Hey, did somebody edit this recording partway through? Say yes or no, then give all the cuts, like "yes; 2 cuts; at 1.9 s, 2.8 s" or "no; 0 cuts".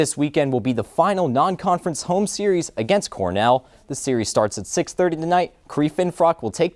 no; 0 cuts